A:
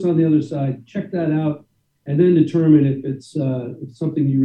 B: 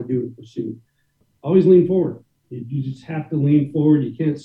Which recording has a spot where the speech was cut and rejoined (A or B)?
B